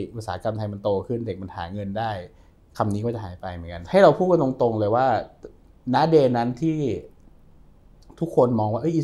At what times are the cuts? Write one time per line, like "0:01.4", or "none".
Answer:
0:03.7